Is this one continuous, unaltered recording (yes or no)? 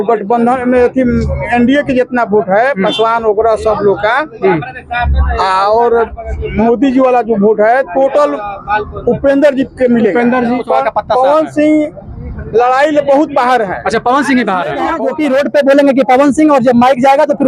no